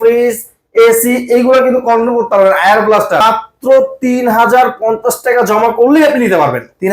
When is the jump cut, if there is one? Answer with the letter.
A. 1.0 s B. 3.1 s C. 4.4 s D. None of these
B